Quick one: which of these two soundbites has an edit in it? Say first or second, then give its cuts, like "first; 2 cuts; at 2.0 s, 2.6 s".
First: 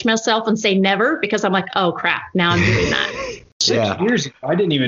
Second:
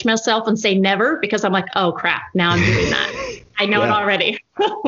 first; 1 cut; at 3.6 s